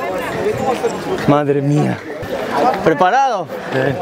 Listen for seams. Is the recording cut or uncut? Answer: cut